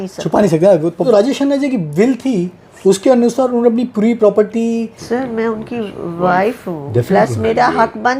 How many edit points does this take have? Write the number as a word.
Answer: two